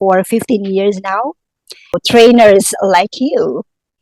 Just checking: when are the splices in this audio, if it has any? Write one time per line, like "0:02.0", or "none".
0:02.0

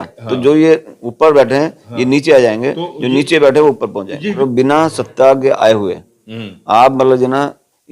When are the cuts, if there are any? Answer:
0:04.4

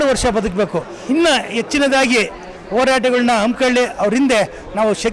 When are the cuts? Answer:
0:01.0

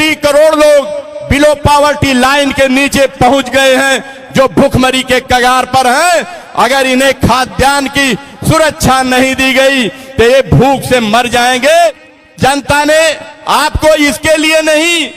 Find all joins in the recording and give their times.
0:11.9

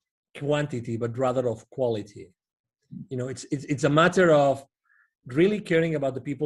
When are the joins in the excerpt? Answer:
none

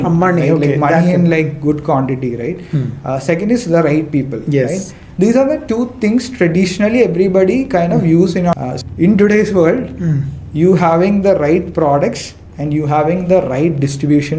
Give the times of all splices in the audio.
0:08.5

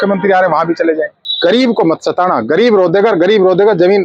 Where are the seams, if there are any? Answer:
0:01.2

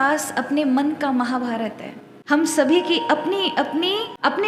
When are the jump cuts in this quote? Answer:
none

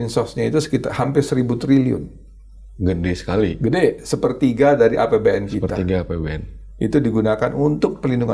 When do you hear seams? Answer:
none

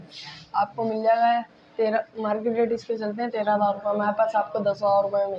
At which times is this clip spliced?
none

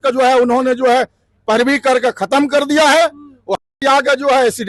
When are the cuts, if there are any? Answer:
none

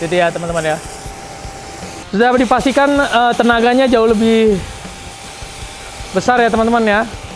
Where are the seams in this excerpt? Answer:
0:01.9

